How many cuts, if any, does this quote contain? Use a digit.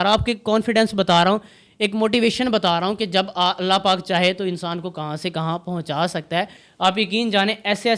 1